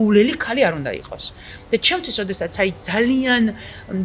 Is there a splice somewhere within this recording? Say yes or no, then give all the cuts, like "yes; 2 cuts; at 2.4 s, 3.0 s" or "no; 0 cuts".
no; 0 cuts